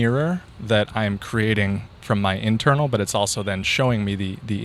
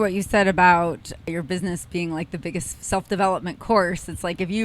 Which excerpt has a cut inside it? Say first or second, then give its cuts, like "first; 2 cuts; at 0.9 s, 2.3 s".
second; 1 cut; at 1.3 s